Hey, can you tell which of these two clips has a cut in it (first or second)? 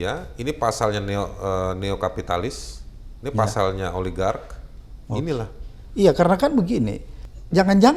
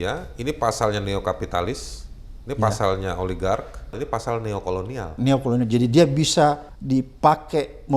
second